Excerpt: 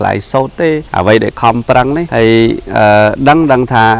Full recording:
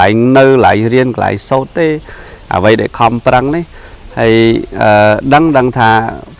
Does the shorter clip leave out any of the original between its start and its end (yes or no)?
yes